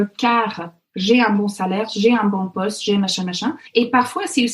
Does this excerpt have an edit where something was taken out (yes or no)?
yes